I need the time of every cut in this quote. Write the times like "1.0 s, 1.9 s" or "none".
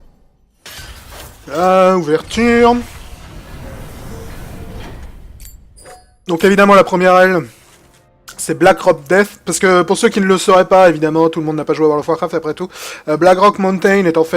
6.8 s